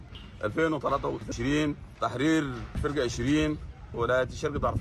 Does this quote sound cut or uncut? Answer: uncut